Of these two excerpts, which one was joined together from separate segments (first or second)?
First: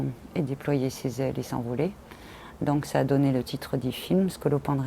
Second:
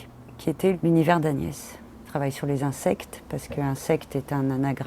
second